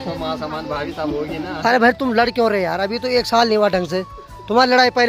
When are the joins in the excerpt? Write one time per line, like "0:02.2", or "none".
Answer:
none